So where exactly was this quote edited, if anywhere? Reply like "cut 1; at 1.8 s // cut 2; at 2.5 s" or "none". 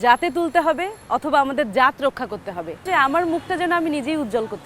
cut 1; at 2.8 s